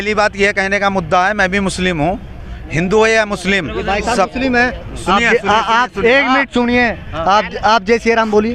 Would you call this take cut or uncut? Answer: cut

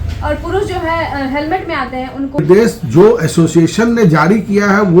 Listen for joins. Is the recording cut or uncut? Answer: cut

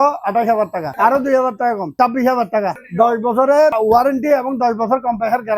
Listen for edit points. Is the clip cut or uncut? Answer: cut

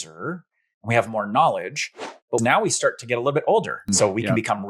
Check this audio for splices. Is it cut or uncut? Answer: cut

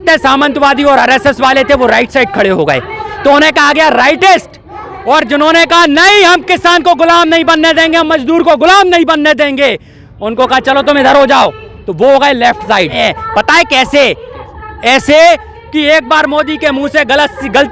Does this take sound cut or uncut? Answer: cut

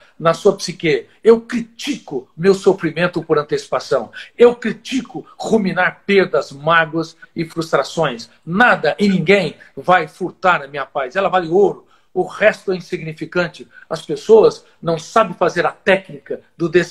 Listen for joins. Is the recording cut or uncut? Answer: uncut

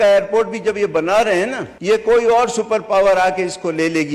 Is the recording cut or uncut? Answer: cut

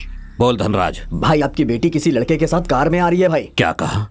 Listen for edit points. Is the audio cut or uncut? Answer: uncut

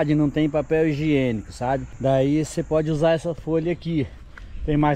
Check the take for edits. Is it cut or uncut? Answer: uncut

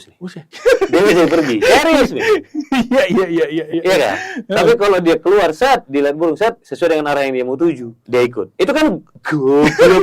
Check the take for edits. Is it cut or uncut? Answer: cut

